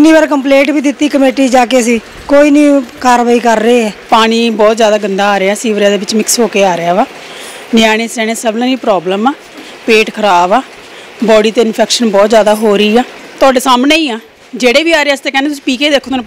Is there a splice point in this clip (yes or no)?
yes